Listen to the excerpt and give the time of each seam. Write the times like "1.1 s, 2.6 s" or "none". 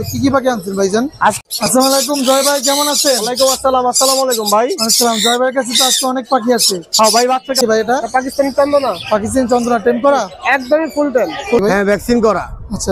1.4 s, 7.6 s, 11.6 s